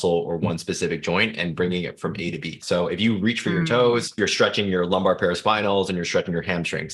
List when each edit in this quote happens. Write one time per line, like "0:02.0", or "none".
0:02.6
0:04.1